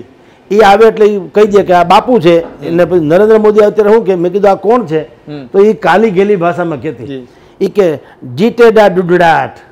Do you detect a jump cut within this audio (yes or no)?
no